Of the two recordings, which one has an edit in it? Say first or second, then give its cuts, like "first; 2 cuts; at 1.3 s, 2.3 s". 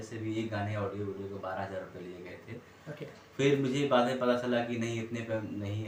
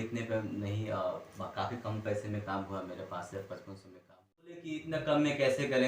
second; 1 cut; at 4.7 s